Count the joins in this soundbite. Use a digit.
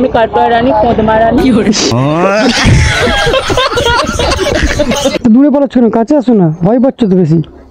0